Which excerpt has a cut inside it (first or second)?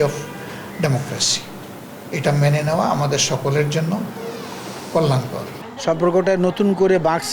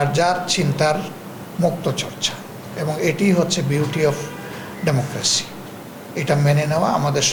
first